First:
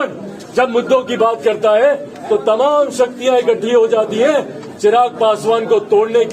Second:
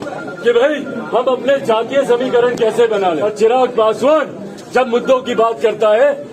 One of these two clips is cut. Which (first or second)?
second